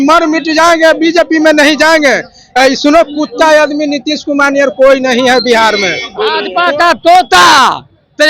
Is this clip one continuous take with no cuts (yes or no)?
no